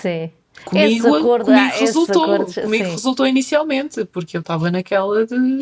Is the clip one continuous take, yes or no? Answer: yes